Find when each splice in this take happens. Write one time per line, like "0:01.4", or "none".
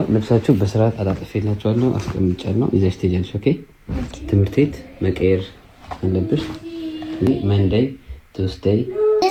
none